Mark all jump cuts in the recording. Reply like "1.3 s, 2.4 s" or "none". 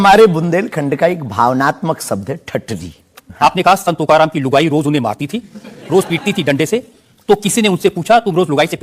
3.2 s